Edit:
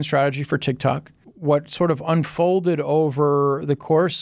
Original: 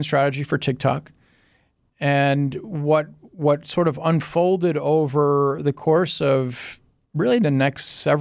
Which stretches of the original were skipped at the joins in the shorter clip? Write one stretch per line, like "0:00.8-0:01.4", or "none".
0:01.2-0:03.2